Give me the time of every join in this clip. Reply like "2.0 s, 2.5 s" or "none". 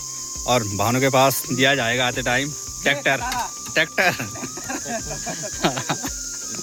none